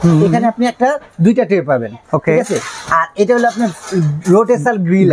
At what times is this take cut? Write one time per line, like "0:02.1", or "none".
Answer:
none